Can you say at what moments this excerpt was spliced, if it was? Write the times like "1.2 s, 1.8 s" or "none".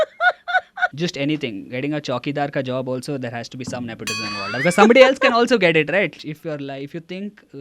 0.9 s, 6.2 s